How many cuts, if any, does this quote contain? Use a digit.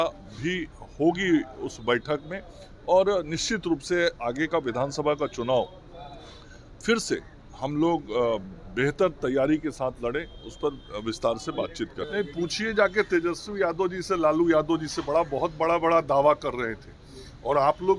1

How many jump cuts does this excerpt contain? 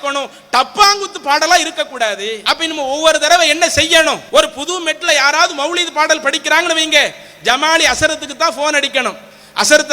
2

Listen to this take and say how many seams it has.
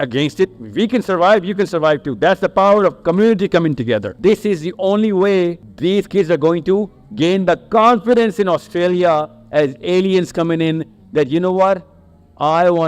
2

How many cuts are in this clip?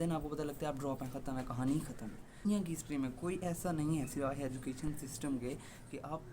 1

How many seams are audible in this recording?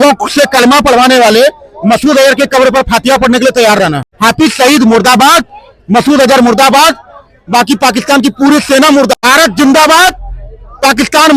2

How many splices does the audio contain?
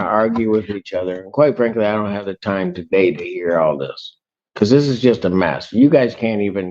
0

